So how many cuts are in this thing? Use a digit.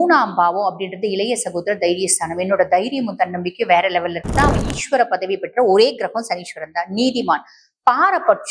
1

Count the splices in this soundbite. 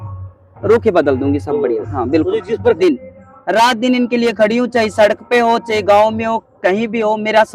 1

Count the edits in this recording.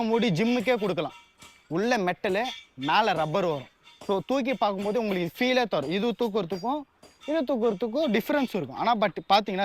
0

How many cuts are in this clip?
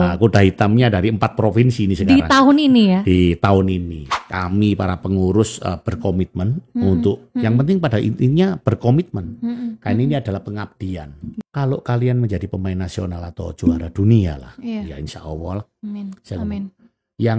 2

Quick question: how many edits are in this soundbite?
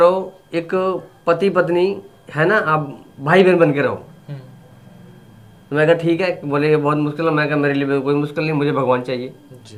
0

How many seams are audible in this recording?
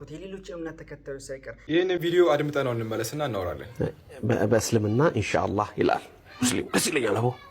1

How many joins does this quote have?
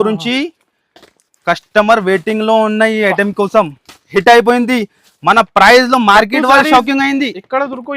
1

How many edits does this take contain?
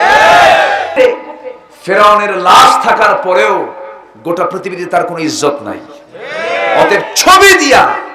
1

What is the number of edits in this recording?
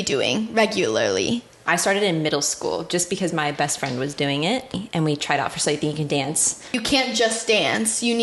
3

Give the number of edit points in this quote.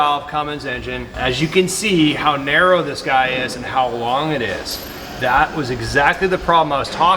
1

